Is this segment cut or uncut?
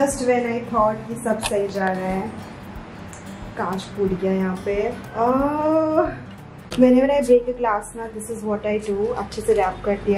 uncut